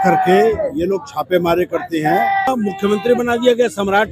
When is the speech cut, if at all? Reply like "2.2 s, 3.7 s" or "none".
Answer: 2.5 s